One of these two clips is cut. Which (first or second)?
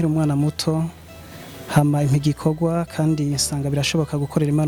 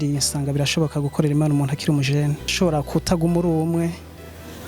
second